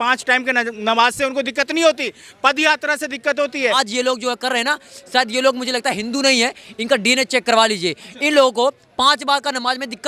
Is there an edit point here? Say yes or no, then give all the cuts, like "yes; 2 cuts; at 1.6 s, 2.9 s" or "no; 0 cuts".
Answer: yes; 1 cut; at 3.8 s